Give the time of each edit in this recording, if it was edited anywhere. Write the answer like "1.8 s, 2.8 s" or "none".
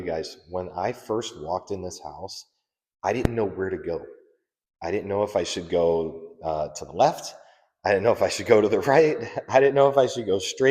none